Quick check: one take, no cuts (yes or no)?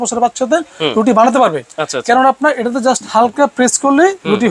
yes